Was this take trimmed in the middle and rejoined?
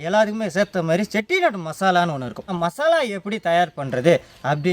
yes; 1 cut; at 2.5 s

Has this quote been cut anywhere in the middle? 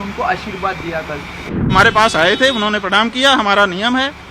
yes; 1 cut; at 1.7 s

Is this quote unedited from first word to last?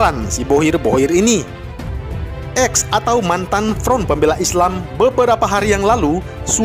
yes; 0 cuts

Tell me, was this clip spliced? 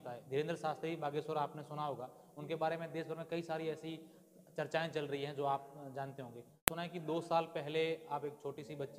yes; 1 cut; at 6.7 s

